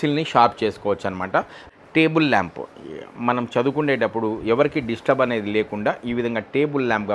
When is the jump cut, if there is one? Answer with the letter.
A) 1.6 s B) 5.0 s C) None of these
A